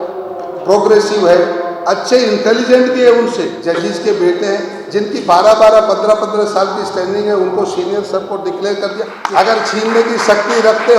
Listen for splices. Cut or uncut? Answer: cut